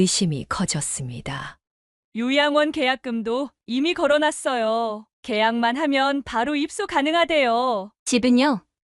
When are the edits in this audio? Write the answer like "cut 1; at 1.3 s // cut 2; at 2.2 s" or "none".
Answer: cut 1; at 7.9 s